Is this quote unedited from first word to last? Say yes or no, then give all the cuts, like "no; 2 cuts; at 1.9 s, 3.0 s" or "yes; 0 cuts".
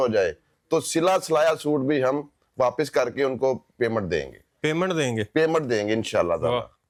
yes; 0 cuts